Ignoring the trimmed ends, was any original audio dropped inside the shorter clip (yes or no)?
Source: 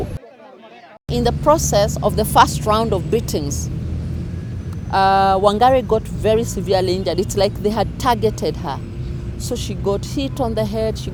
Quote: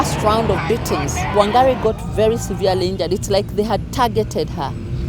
yes